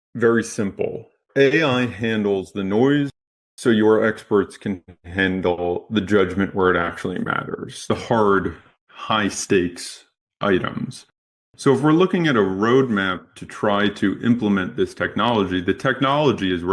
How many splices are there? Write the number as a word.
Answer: one